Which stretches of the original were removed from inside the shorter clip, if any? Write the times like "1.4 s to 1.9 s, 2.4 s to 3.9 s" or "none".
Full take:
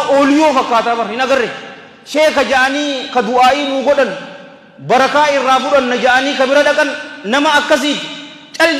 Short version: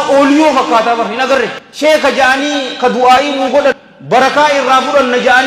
1.6 s to 1.9 s, 4.2 s to 4.7 s